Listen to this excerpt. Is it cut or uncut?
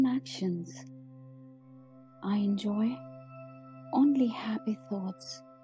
uncut